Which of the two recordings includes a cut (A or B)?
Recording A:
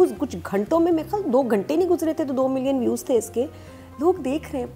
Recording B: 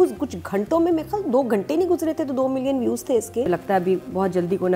B